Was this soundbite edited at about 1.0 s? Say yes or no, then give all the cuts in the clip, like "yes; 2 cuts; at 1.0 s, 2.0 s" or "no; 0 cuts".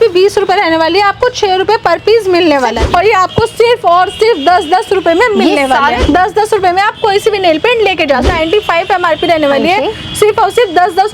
no; 3 cuts; at 2.8 s, 6.0 s, 8.3 s